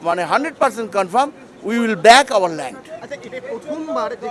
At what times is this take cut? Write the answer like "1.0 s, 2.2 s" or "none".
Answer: none